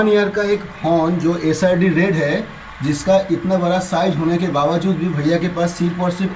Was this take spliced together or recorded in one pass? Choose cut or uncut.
uncut